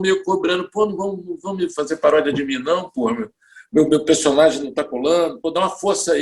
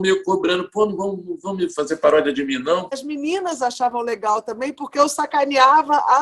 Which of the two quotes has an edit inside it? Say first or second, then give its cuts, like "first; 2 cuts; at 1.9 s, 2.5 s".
second; 1 cut; at 3.0 s